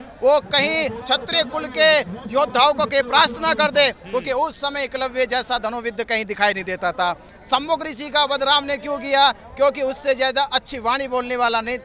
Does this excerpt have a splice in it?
no; 0 cuts

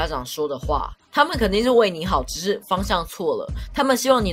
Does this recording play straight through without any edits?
yes; 0 cuts

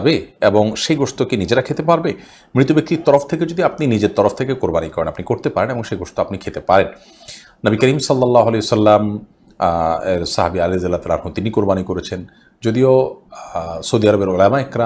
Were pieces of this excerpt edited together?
no; 0 cuts

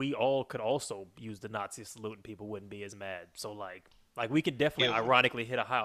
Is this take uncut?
no; 1 cut; at 3.9 s

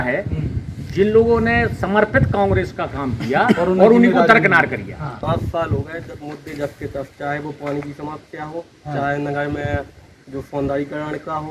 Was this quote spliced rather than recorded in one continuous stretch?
yes; 1 cut; at 5.2 s

